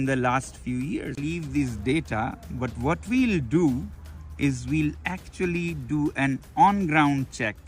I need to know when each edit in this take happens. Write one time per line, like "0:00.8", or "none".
0:01.3